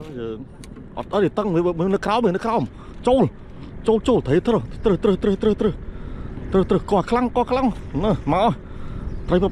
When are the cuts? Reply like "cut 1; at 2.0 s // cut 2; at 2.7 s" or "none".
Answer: none